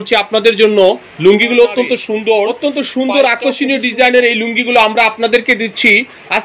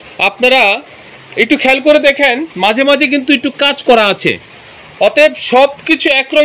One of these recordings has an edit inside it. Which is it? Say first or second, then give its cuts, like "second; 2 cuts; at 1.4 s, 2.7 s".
first; 1 cut; at 2.5 s